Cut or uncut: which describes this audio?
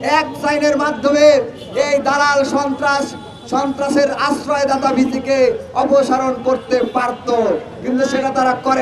uncut